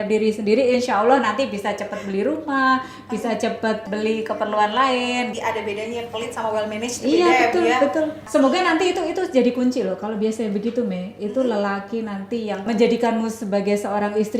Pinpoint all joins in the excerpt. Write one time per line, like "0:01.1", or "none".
0:03.8
0:05.3
0:08.2
0:12.7